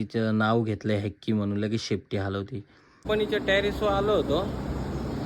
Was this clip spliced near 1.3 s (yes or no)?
no